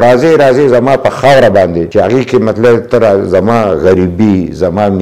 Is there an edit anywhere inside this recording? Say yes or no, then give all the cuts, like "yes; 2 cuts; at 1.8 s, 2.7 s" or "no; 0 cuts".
no; 0 cuts